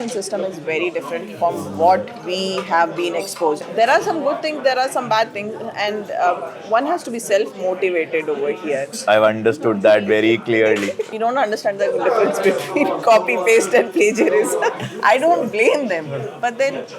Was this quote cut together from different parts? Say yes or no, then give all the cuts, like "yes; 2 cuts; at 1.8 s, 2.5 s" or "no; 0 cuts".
yes; 4 cuts; at 3.6 s, 9.0 s, 11.0 s, 14.9 s